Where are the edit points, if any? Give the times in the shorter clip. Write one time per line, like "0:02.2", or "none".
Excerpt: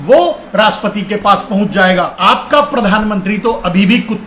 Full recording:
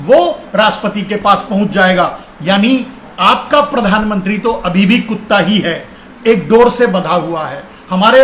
0:02.1